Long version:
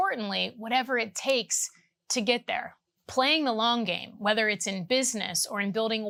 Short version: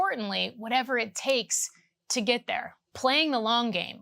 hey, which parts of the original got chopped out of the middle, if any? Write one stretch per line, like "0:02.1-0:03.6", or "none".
0:02.8-0:02.9